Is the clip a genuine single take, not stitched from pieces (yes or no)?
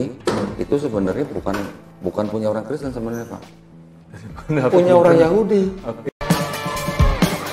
no